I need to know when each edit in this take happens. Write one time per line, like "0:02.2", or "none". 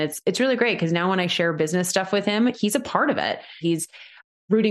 0:03.6